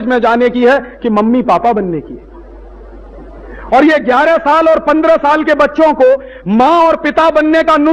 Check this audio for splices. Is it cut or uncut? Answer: uncut